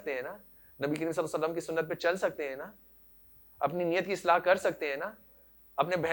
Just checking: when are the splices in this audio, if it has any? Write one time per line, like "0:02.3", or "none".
none